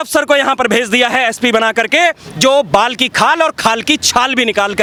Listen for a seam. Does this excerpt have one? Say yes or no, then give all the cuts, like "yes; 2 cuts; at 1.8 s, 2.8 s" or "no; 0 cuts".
no; 0 cuts